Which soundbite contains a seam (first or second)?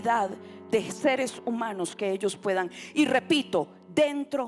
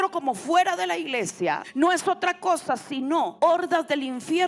second